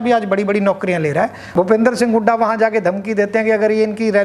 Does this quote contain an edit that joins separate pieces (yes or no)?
yes